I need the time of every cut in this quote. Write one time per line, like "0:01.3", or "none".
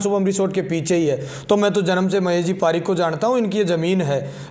none